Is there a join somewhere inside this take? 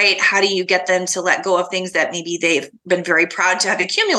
no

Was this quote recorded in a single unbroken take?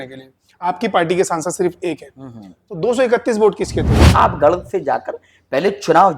no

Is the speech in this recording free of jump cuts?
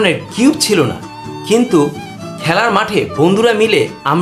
yes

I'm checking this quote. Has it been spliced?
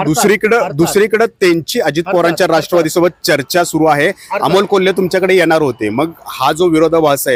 no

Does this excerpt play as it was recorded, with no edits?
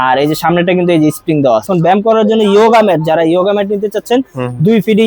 no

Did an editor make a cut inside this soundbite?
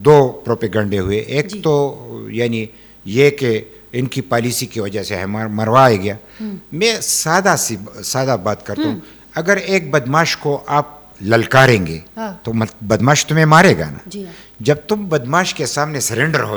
no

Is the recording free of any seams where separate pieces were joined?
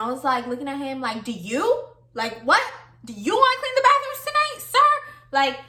yes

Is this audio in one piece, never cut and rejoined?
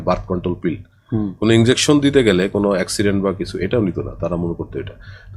yes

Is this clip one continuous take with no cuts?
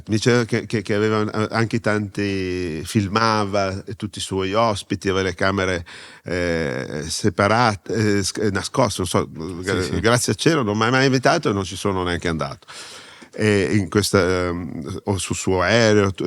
yes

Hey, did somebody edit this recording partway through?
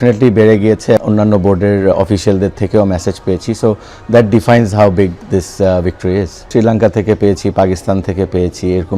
yes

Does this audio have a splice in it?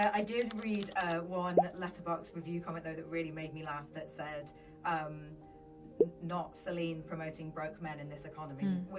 no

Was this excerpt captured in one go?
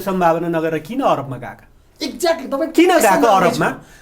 yes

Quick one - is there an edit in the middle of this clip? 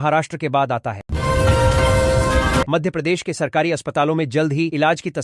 yes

